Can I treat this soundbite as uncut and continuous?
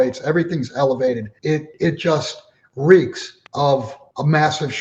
no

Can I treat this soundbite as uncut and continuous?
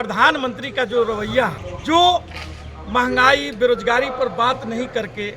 no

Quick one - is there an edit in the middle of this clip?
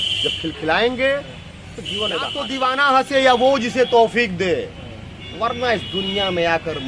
yes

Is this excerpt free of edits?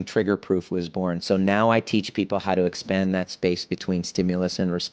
yes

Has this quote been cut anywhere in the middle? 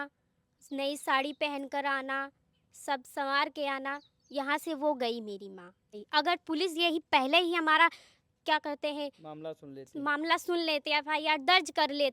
yes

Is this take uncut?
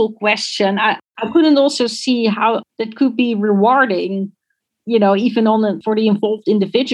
no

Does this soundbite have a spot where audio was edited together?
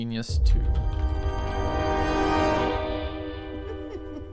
no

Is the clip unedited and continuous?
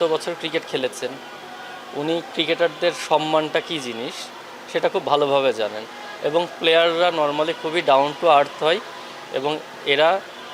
yes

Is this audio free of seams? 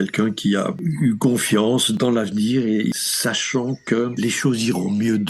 no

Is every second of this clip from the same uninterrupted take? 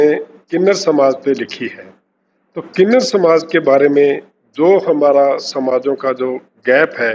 yes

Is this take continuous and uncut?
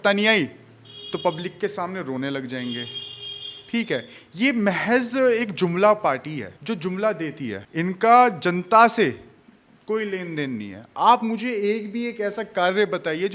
no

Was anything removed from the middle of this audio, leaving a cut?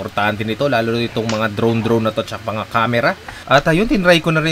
yes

